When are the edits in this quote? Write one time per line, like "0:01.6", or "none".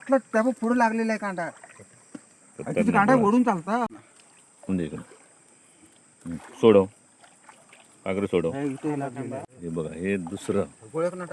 0:09.5